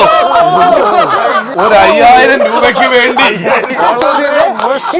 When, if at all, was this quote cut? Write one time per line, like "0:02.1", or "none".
0:01.5
0:03.7